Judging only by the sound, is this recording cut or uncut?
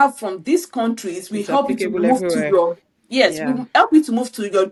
uncut